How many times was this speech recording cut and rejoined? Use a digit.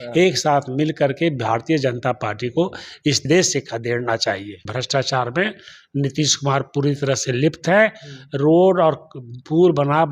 2